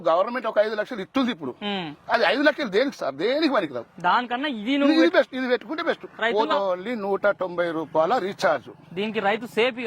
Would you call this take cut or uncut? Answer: cut